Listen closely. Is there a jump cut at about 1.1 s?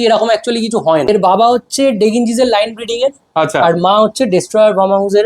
yes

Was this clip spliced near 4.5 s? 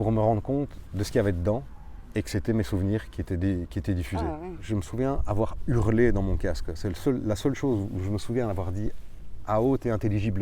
yes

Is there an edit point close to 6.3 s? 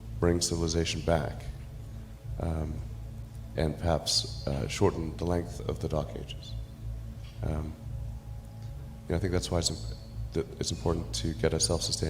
no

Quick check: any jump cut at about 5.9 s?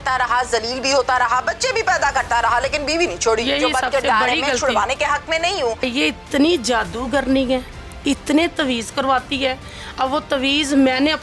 yes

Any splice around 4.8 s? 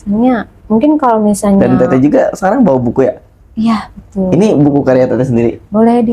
no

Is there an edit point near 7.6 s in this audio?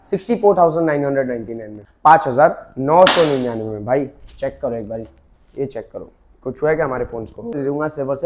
yes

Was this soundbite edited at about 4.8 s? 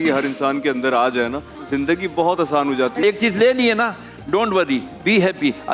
no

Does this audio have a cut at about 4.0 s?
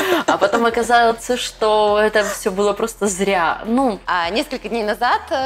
yes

